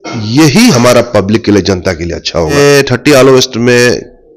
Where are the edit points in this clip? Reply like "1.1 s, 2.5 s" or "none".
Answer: 2.5 s